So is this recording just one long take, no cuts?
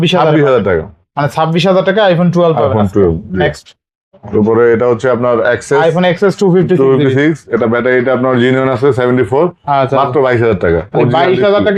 yes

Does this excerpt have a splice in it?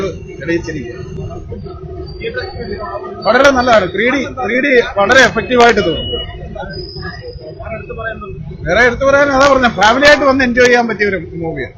no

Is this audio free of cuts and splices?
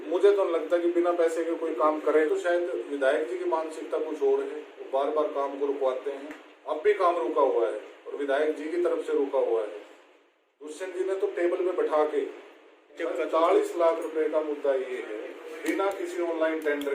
no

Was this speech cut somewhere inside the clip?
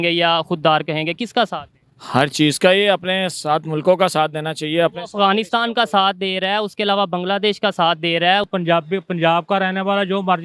yes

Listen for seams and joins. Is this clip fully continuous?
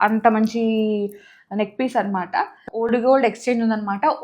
no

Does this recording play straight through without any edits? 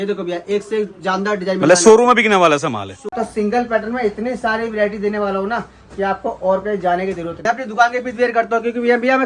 no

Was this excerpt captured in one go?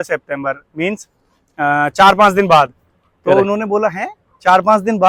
yes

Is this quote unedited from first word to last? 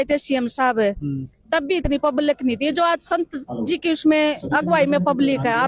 yes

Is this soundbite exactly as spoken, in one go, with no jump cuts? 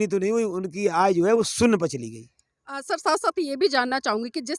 yes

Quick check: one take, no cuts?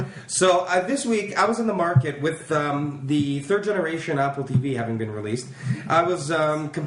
yes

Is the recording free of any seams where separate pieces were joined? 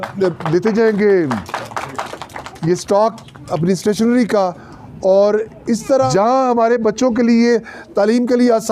no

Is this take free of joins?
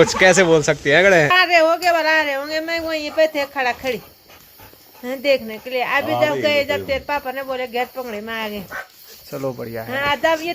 no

